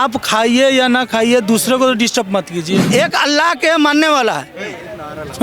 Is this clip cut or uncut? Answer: cut